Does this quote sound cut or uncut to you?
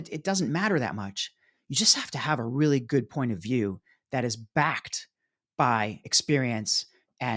uncut